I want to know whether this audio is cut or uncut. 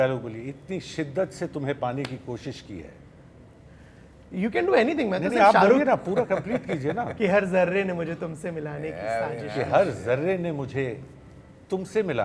uncut